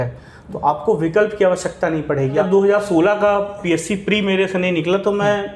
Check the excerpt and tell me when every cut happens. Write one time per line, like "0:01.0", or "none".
0:02.4

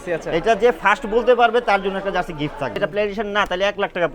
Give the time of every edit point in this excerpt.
0:02.8

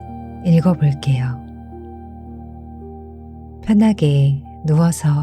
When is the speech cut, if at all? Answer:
0:01.3
0:03.4

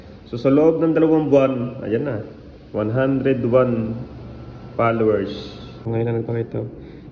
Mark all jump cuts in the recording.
0:05.9

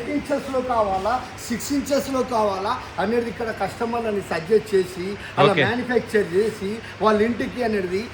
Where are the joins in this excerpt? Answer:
none

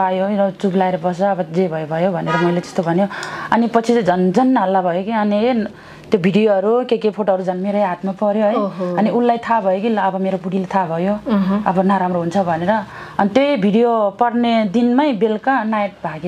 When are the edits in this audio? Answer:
none

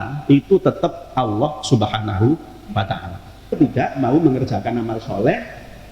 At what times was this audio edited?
0:03.5

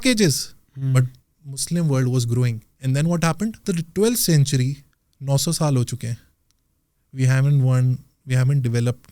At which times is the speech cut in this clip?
0:03.6

